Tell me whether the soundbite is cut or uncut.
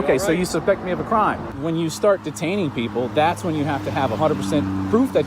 cut